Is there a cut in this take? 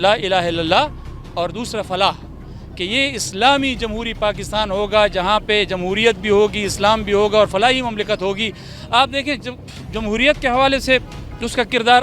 no; 0 cuts

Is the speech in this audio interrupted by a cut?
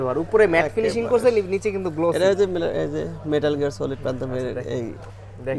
no; 0 cuts

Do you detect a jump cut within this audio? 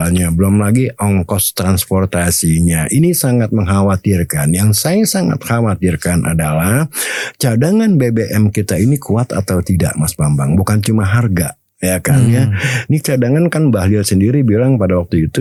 no; 0 cuts

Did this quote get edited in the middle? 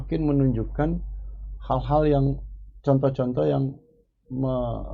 no; 0 cuts

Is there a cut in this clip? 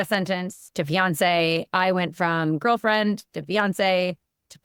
no; 0 cuts

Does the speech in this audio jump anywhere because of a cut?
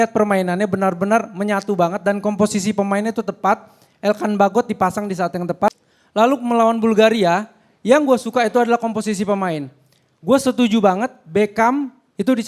yes; 1 cut; at 5.8 s

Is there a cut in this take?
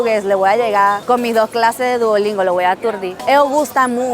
yes; 1 cut; at 3.1 s

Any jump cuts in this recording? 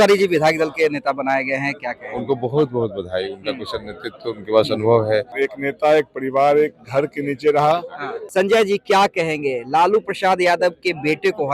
yes; 2 cuts; at 5.3 s, 8.1 s

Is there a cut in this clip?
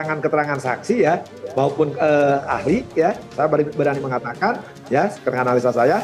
no; 0 cuts

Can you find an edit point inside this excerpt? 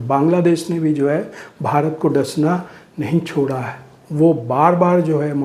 no; 0 cuts

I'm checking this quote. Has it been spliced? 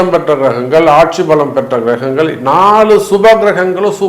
no; 0 cuts

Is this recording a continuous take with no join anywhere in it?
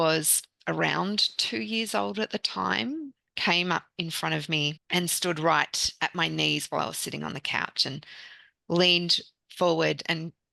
no; 1 cut; at 4.8 s

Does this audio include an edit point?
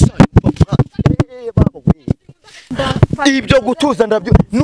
yes; 1 cut; at 2.7 s

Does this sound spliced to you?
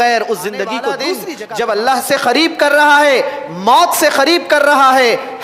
yes; 1 cut; at 1.3 s

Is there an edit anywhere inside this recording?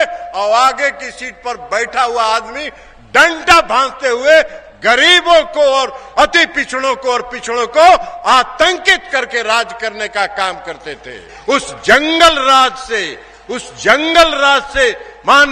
yes; 1 cut; at 11.3 s

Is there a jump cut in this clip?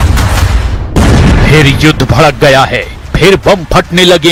no; 0 cuts

